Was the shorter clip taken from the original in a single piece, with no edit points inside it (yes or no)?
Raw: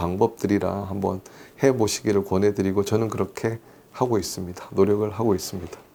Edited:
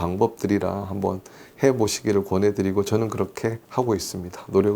no